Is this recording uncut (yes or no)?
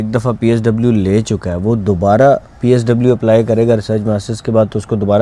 yes